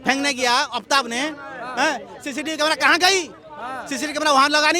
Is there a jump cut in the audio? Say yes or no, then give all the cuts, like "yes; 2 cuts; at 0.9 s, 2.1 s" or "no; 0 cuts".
no; 0 cuts